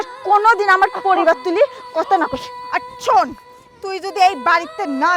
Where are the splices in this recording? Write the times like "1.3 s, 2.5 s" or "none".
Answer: 2.5 s